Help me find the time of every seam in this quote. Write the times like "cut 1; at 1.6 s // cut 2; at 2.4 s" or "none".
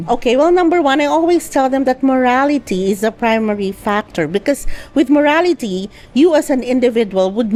none

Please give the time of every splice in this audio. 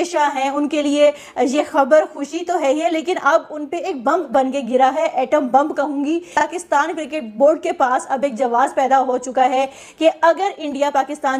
cut 1; at 6.3 s

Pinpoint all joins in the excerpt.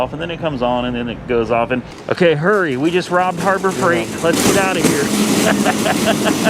cut 1; at 1.9 s

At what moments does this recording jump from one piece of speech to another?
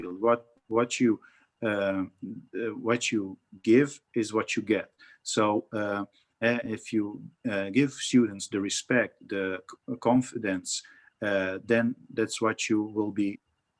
none

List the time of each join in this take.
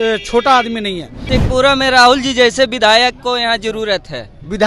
cut 1; at 1.2 s

